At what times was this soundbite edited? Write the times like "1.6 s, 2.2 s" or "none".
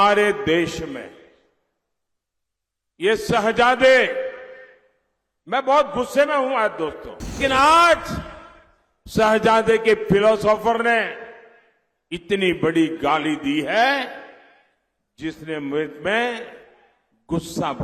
7.4 s